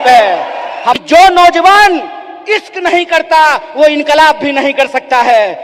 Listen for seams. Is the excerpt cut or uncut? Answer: cut